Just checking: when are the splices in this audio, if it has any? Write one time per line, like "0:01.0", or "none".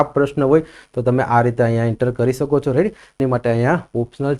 0:03.2